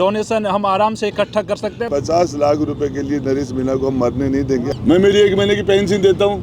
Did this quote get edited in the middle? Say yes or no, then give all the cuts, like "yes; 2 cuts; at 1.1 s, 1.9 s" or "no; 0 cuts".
yes; 2 cuts; at 1.9 s, 4.8 s